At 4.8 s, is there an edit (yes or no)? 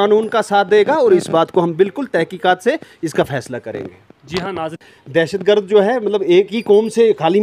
yes